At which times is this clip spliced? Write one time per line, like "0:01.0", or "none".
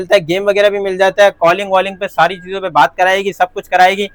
none